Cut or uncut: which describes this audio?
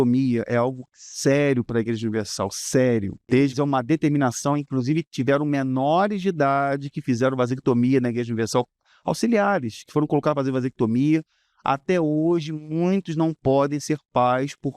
cut